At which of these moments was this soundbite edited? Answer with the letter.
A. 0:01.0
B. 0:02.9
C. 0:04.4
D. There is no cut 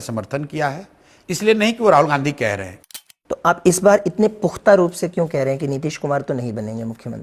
B